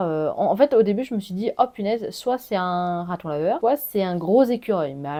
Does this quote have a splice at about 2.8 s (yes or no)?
no